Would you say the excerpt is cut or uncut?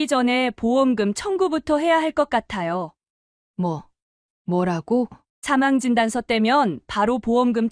uncut